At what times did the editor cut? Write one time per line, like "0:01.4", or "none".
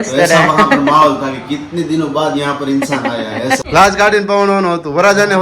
0:03.6